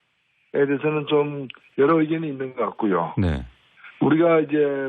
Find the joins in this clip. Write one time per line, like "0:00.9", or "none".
0:03.9